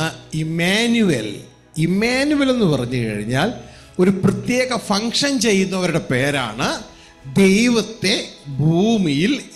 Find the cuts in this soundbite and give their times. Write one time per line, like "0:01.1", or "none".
none